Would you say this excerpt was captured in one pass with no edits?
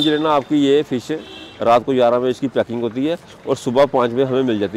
no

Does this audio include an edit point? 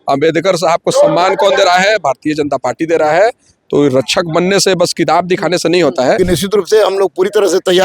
yes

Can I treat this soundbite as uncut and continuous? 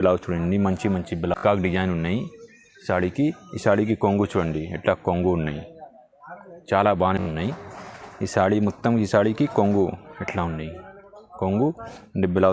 no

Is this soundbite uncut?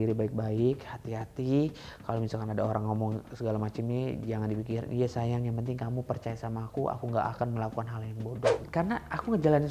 no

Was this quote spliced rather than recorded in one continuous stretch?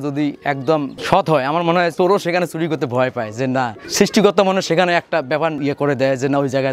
yes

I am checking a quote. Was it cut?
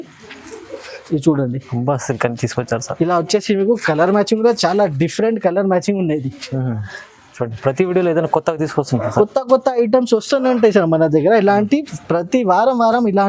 no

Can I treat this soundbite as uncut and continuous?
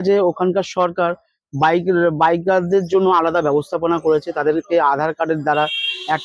yes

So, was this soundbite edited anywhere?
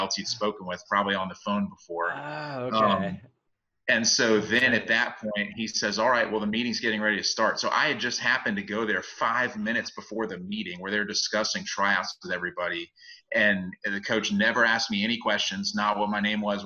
no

